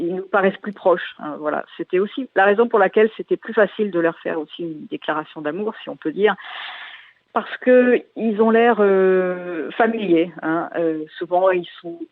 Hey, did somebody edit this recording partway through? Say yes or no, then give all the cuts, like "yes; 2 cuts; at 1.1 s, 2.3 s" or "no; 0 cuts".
no; 0 cuts